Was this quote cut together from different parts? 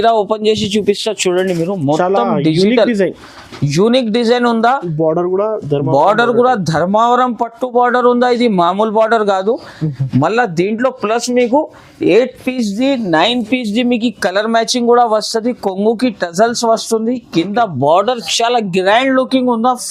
no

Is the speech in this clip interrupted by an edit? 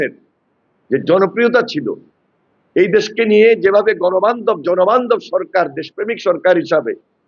no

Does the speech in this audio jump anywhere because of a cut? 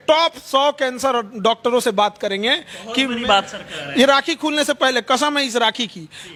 no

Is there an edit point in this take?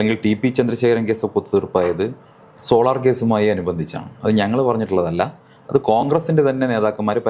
no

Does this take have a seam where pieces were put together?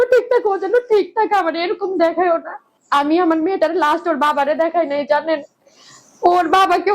yes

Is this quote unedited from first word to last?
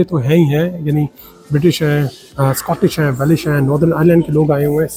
yes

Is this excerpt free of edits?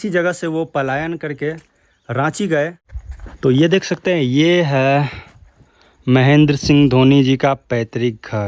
yes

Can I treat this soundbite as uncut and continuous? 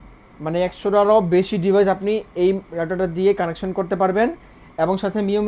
yes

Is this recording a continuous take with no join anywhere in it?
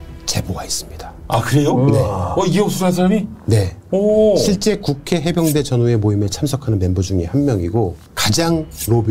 yes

